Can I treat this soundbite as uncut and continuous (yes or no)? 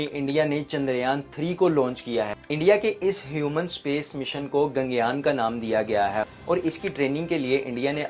no